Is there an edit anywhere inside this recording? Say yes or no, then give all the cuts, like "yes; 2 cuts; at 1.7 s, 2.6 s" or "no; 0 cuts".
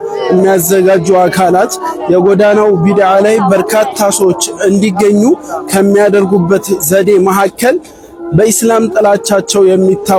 no; 0 cuts